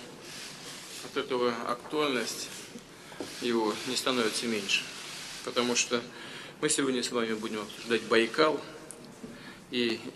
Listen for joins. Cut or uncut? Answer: uncut